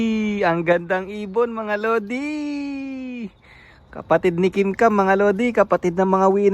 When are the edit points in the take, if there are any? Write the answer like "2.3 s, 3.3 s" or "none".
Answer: none